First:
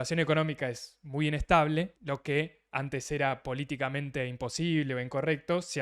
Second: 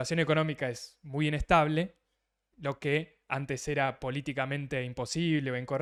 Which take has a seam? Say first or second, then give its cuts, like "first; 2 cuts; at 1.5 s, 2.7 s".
first; 1 cut; at 2.0 s